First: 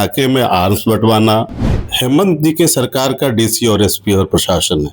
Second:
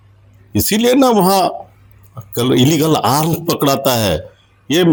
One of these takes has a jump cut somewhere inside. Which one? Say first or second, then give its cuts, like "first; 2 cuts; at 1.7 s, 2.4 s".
first; 1 cut; at 1.9 s